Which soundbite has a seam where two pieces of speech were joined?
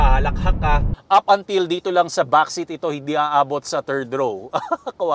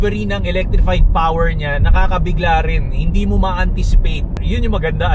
first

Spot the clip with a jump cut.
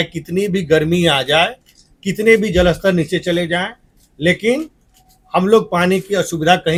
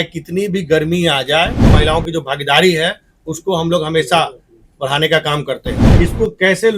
second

